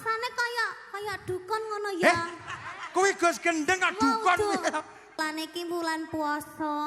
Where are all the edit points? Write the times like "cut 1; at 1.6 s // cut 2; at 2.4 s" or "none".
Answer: cut 1; at 5.2 s

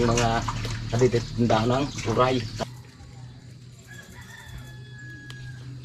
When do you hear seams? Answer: cut 1; at 2.6 s

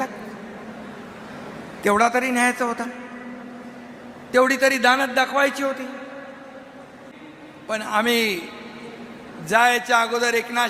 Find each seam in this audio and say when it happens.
cut 1; at 7.0 s

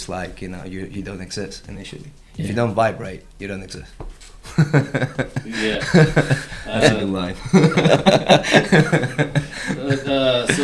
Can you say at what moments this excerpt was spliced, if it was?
none

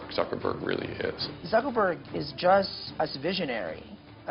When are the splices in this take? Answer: cut 1; at 1.3 s // cut 2; at 2.8 s

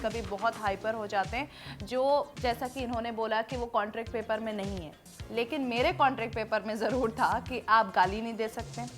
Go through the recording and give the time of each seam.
none

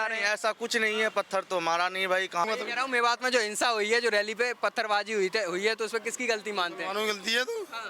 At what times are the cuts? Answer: cut 1; at 2.4 s

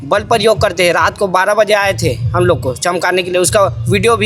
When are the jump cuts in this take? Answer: none

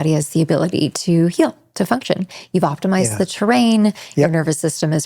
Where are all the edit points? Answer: none

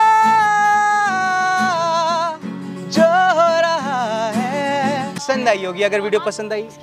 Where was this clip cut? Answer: cut 1; at 5.2 s

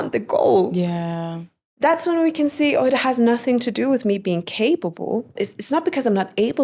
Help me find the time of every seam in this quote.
cut 1; at 5.3 s

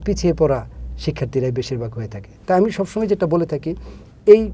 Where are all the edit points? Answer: none

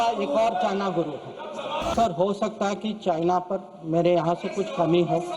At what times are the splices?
cut 1; at 1.9 s

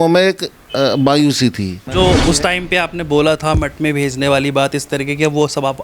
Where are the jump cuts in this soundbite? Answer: cut 1; at 1.8 s

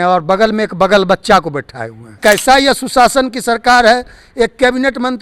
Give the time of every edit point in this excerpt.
cut 1; at 2.1 s

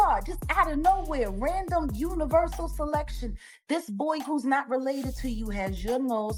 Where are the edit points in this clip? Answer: none

